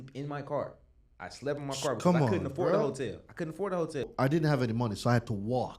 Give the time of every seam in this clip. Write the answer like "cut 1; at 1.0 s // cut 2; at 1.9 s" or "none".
cut 1; at 4.0 s